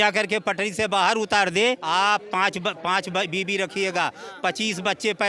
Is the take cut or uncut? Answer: cut